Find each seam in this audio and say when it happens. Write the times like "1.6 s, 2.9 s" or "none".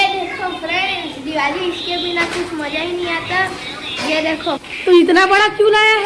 none